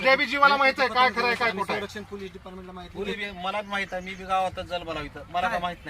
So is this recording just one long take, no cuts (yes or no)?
no